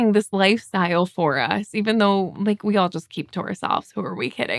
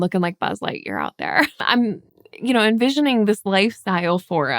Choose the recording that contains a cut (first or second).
second